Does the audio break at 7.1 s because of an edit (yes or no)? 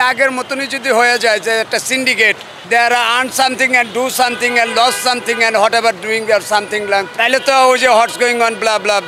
yes